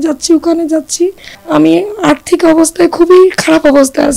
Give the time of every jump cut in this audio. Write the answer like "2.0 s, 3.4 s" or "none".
1.3 s

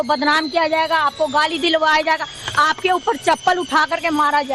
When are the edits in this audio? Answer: none

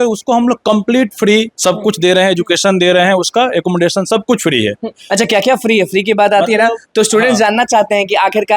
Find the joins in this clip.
1.5 s

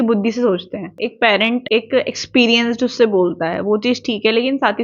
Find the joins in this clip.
0.9 s, 1.6 s

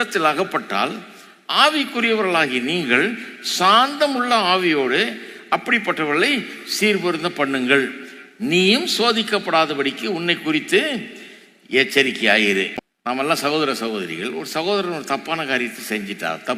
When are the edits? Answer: none

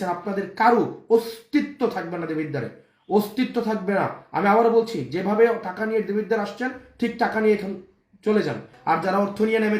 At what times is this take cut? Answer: 8.7 s

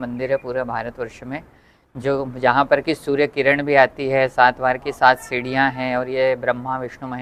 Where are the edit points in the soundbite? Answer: none

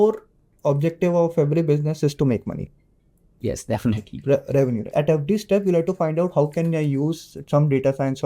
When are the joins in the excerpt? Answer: 4.8 s

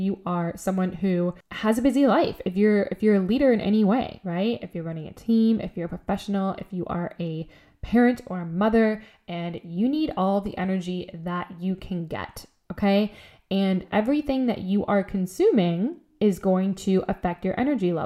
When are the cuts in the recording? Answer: 1.5 s

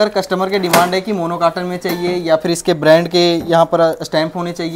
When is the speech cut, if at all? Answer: none

